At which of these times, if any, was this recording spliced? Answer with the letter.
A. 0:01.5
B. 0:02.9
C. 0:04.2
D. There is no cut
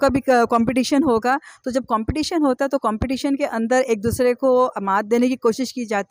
D